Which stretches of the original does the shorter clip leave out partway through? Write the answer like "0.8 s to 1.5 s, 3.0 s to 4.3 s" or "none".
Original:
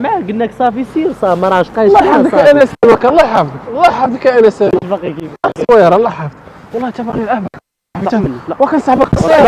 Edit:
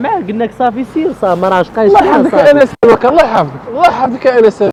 none